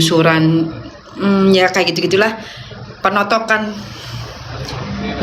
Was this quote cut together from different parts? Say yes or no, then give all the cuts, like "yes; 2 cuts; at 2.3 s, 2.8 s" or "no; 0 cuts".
no; 0 cuts